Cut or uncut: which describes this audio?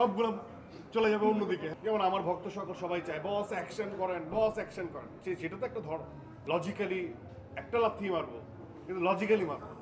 cut